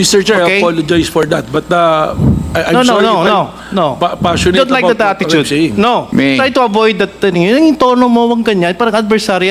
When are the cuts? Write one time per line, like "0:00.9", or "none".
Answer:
0:06.1